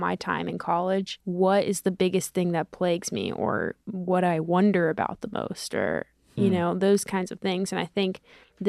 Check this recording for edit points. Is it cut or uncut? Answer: cut